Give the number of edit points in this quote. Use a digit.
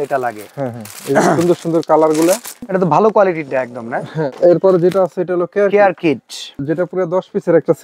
3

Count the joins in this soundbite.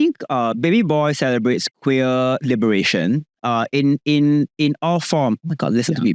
0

